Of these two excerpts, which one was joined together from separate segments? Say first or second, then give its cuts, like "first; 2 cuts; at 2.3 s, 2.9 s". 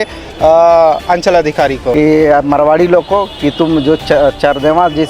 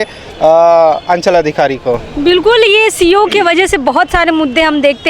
first; 1 cut; at 1.9 s